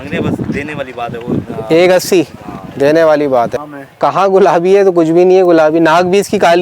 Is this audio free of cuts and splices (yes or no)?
no